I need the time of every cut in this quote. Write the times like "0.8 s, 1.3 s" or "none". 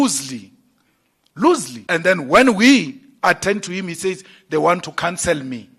1.7 s